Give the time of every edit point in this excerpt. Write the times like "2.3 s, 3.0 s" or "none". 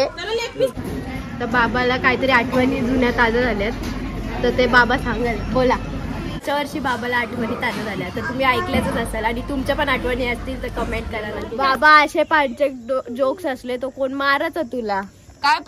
1.1 s, 6.4 s, 11.5 s